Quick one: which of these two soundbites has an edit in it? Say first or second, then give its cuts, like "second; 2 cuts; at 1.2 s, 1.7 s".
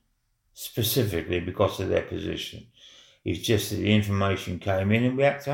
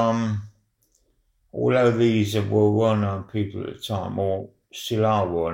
second; 1 cut; at 4.4 s